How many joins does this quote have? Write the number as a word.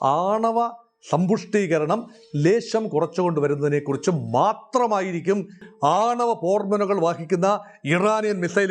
one